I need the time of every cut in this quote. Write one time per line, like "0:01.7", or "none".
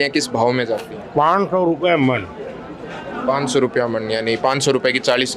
none